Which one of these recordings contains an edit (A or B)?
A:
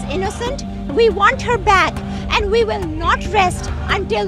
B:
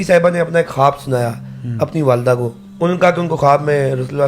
B